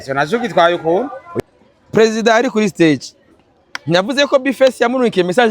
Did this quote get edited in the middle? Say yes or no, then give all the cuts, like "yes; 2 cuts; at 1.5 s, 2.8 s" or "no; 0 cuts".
yes; 1 cut; at 1.2 s